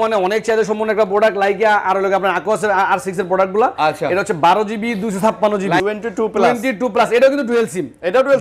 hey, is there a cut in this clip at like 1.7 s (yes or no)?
no